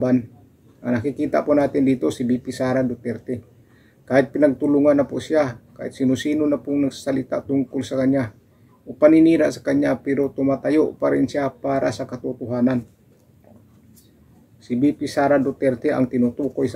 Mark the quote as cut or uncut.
uncut